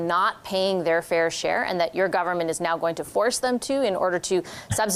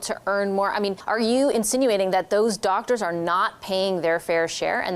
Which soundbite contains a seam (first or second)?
second